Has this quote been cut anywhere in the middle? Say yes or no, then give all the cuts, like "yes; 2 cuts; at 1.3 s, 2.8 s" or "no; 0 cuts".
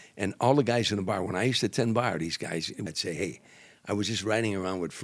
yes; 1 cut; at 2.8 s